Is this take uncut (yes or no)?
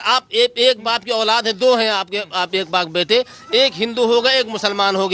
yes